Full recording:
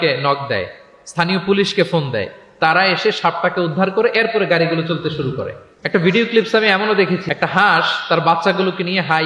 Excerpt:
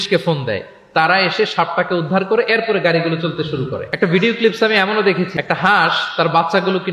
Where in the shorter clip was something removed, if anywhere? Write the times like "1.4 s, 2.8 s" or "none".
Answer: 3.8 s